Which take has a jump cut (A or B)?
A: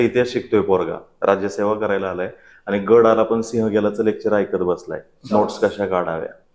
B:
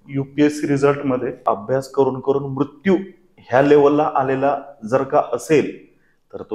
B